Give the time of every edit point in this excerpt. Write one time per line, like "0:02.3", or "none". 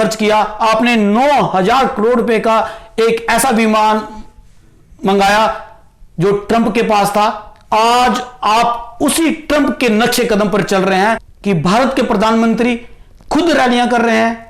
0:11.3